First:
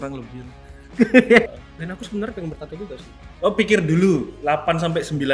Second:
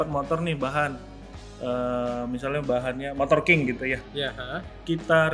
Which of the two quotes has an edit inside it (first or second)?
first